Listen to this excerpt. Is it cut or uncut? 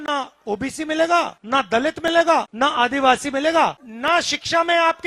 cut